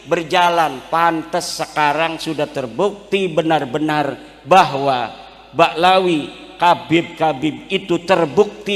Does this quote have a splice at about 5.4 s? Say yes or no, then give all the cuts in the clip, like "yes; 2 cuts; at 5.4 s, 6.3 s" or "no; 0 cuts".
no; 0 cuts